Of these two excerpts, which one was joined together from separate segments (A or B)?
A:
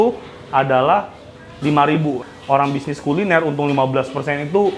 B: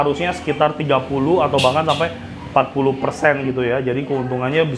A